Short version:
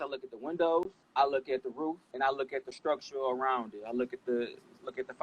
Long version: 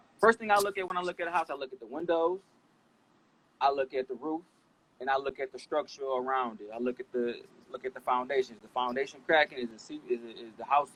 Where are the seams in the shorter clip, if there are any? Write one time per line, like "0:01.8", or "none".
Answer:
0:01.0
0:02.1